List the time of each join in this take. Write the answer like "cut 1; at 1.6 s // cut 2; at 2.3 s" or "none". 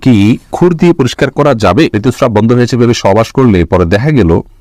cut 1; at 2.0 s

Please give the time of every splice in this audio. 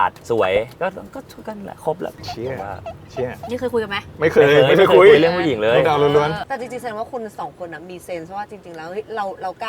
cut 1; at 6.4 s

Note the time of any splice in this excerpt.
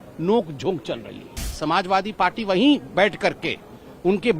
cut 1; at 1.4 s

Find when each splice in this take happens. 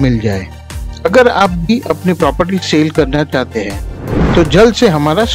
none

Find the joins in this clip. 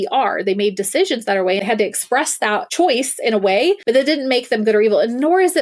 cut 1; at 1.6 s // cut 2; at 2.7 s // cut 3; at 3.8 s

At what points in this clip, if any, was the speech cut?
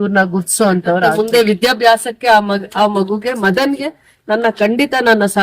cut 1; at 1.1 s

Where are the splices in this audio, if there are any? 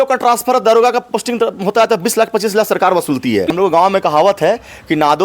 cut 1; at 3.5 s

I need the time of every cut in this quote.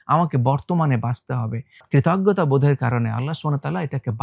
cut 1; at 1.8 s

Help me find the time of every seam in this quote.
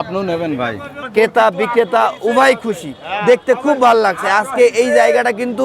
cut 1; at 1.0 s

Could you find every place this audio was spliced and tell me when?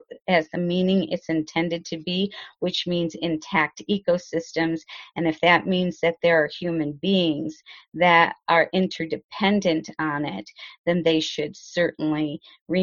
none

